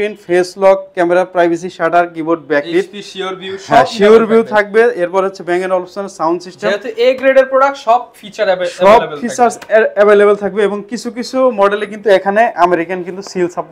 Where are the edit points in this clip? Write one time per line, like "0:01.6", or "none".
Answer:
none